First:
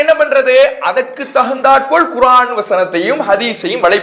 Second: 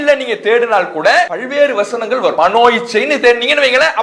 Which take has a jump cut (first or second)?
second